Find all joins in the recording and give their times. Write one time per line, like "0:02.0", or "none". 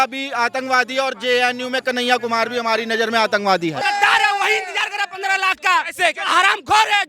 0:03.8